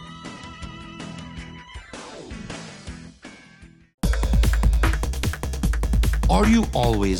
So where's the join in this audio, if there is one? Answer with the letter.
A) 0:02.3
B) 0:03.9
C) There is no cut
B